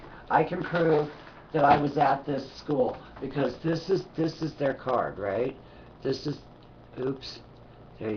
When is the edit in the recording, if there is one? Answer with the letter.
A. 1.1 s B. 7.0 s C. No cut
B